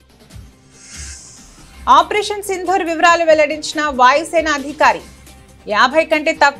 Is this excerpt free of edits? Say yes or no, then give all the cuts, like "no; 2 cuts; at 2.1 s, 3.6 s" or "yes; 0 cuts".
no; 1 cut; at 1.8 s